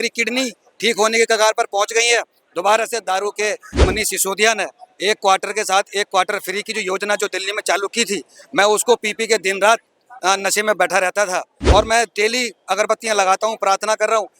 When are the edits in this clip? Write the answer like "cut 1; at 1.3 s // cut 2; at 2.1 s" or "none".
cut 1; at 3.8 s // cut 2; at 11.5 s